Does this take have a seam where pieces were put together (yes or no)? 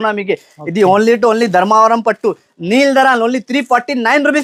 no